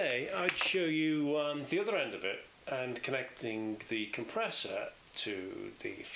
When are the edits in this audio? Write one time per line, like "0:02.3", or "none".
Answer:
none